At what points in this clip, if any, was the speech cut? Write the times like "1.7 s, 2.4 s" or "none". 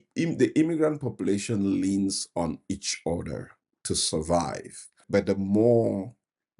5.0 s